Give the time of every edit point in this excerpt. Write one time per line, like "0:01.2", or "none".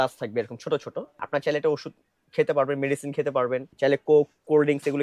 0:01.1
0:03.7